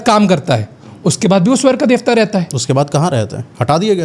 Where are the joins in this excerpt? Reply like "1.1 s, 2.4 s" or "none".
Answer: none